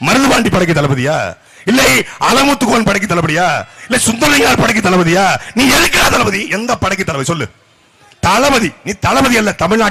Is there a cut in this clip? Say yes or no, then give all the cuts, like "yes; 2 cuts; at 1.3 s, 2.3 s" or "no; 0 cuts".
no; 0 cuts